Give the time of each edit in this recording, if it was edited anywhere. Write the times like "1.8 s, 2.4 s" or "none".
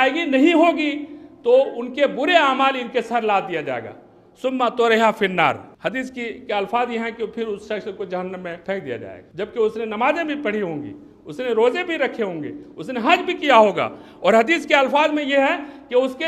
5.7 s, 8.8 s

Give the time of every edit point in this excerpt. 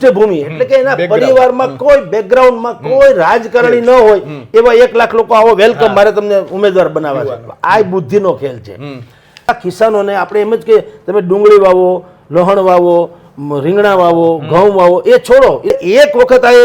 9.5 s, 15.7 s

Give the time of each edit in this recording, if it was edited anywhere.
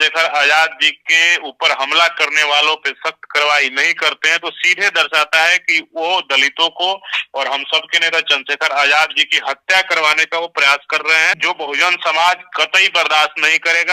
11.4 s

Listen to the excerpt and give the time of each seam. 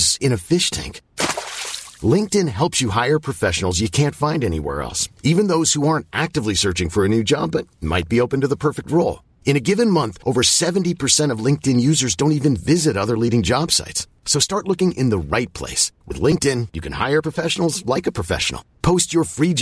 none

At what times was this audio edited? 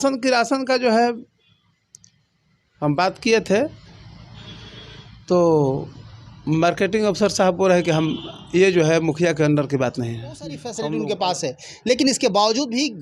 10.8 s

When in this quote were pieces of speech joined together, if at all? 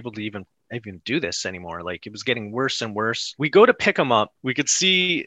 3.3 s, 4.3 s

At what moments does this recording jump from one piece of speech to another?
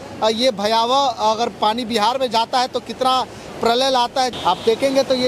4.3 s

